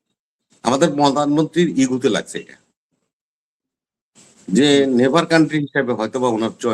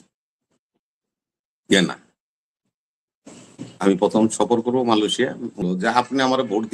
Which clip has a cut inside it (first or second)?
second